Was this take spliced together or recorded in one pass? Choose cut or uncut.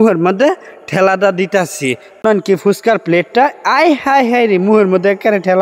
cut